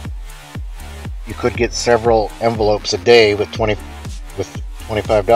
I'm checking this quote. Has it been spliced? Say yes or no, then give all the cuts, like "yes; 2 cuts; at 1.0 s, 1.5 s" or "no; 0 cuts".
yes; 1 cut; at 1.2 s